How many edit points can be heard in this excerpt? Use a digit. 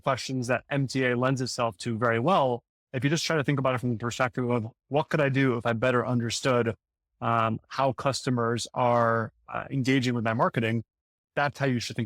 1